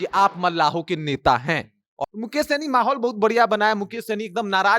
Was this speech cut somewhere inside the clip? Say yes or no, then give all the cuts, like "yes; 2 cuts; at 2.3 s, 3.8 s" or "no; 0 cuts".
yes; 1 cut; at 1.9 s